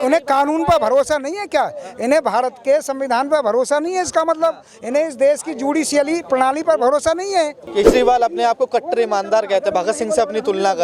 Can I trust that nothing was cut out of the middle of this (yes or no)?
no